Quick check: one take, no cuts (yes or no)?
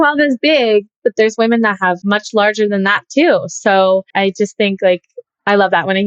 no